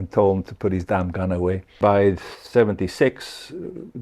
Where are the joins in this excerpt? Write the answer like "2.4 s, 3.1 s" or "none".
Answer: 1.8 s